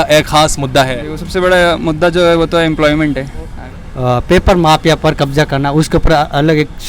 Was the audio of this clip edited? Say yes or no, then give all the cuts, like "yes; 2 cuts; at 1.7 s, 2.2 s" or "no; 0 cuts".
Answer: yes; 1 cut; at 3.6 s